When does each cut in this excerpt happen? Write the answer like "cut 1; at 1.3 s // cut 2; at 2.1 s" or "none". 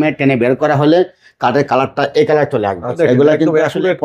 cut 1; at 2.9 s